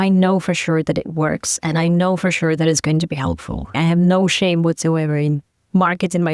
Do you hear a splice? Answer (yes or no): yes